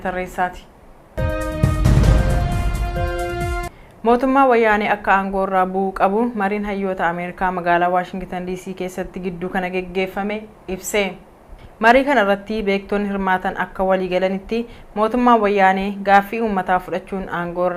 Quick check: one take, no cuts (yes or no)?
yes